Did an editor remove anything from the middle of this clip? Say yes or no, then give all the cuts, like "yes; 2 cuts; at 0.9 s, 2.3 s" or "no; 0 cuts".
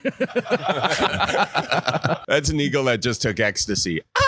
yes; 1 cut; at 2.2 s